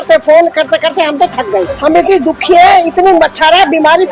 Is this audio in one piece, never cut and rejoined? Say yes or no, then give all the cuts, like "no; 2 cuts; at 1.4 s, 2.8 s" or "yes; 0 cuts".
no; 1 cut; at 1.7 s